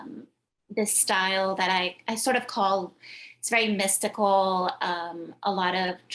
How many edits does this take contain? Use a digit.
0